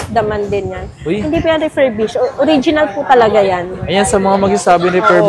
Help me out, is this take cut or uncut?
uncut